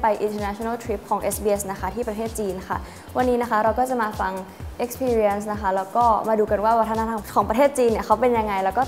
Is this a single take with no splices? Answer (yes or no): no